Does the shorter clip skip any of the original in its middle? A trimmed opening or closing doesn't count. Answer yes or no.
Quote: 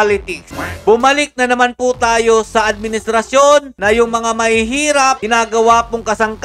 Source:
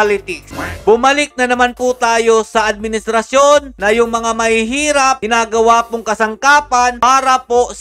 no